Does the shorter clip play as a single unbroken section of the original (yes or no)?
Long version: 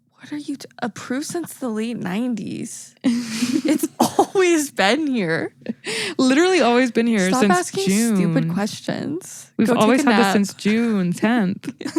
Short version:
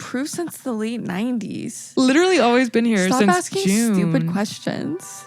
no